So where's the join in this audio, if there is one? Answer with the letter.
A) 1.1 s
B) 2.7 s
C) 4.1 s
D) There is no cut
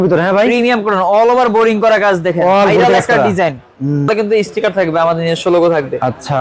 C